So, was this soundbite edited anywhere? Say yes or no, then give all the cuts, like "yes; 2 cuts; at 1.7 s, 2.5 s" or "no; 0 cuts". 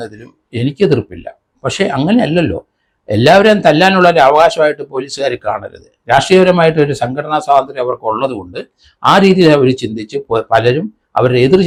no; 0 cuts